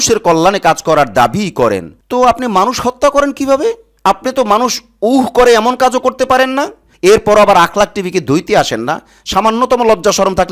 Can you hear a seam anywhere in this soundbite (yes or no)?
yes